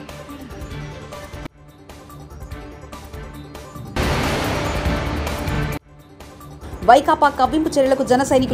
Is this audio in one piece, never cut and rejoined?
yes; 0 cuts

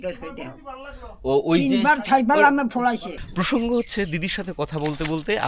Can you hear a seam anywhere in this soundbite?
yes; 1 cut; at 3.3 s

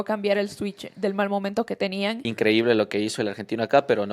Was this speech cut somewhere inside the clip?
yes; 1 cut; at 2.2 s

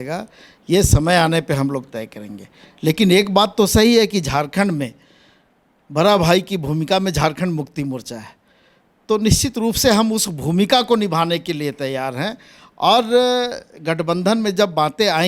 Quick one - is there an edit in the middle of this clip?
no; 0 cuts

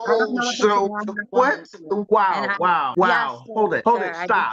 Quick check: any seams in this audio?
yes; 3 cuts; at 2.0 s, 2.9 s, 3.8 s

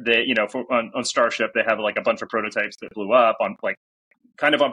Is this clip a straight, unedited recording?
yes; 0 cuts

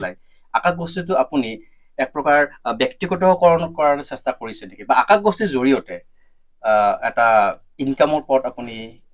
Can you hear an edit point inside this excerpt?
no; 0 cuts

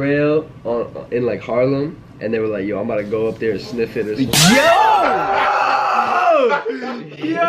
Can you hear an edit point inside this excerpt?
no; 0 cuts

